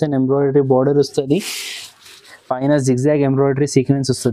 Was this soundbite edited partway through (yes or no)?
no